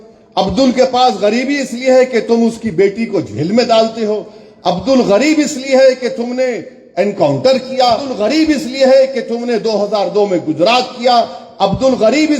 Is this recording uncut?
no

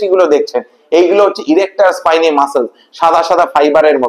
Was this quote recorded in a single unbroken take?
yes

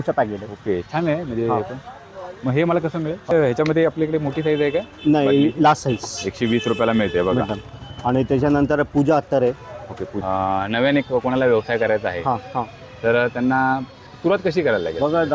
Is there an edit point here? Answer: yes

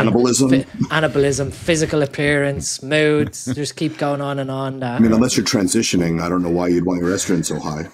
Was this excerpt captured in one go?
yes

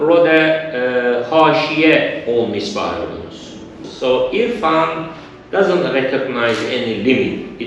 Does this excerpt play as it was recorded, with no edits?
no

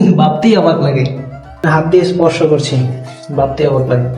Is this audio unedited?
no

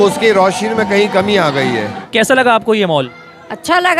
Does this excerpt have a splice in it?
yes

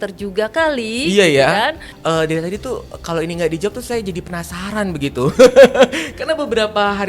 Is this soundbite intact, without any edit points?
no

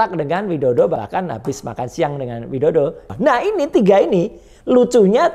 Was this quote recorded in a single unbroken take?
no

